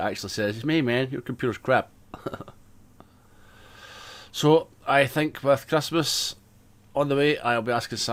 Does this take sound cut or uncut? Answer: uncut